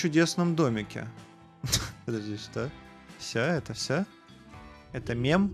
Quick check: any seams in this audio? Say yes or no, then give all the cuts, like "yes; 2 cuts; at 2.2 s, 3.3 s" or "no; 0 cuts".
no; 0 cuts